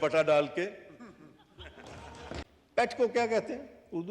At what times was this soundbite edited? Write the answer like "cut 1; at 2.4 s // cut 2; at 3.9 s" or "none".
cut 1; at 2.4 s